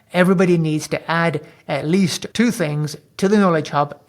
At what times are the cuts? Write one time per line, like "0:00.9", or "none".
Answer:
0:02.2